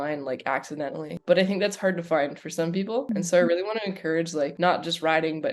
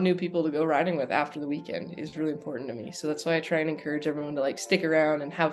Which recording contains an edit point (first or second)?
first